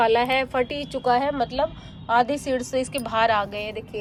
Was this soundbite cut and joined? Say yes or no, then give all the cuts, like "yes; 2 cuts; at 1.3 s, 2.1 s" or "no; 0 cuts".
no; 0 cuts